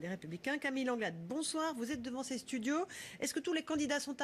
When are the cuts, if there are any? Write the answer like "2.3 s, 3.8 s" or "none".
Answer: none